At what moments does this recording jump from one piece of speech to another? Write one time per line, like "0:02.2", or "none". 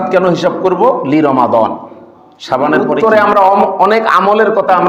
0:03.0